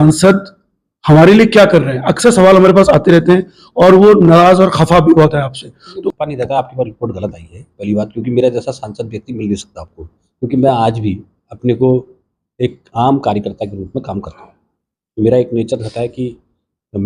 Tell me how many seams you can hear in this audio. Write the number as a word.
zero